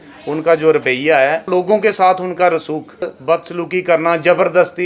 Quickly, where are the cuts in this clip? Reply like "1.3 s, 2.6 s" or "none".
1.4 s, 3.1 s

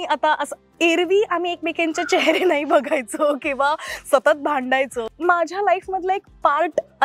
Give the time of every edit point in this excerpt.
5.0 s

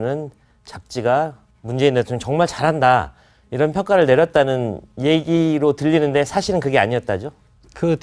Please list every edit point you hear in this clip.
none

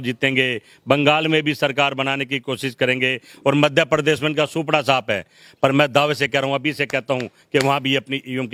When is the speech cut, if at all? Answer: none

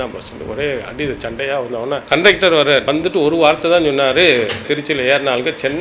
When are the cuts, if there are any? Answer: 2.0 s, 2.9 s, 4.6 s

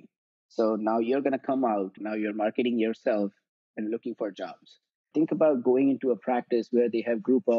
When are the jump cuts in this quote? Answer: 2.0 s, 5.1 s

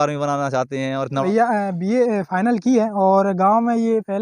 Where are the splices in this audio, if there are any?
1.2 s

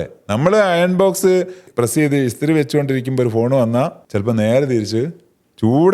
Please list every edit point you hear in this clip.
1.6 s, 4.0 s

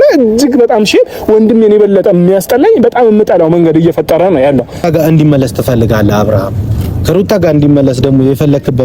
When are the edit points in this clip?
4.8 s

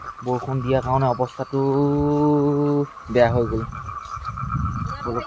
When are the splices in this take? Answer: none

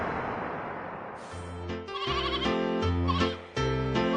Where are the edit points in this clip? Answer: 1.5 s

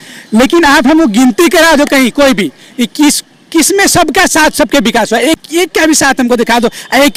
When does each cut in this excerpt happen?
none

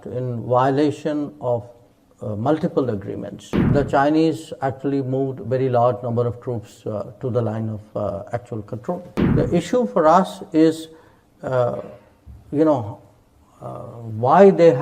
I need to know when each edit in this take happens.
3.7 s, 9.2 s

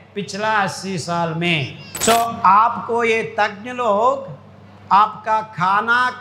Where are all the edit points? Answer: 1.8 s

